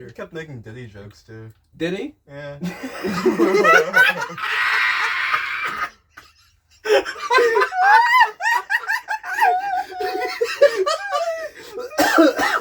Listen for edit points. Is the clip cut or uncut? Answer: uncut